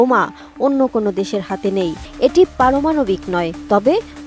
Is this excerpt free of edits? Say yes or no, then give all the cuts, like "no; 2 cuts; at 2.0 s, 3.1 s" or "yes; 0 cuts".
no; 1 cut; at 2.0 s